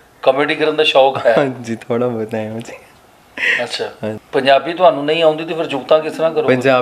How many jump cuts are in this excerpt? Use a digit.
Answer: 1